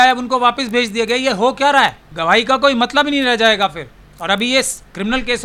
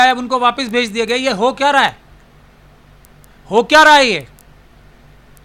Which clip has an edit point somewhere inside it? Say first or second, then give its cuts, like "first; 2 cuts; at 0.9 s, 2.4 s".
first; 1 cut; at 2.1 s